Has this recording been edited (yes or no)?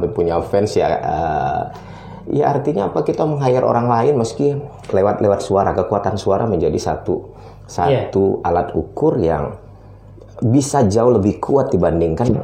no